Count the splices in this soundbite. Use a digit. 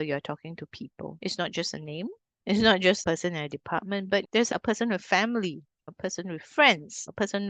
1